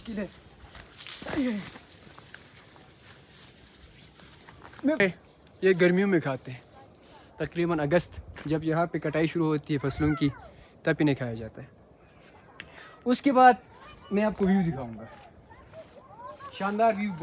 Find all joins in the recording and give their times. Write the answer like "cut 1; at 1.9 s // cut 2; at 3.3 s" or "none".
cut 1; at 5.0 s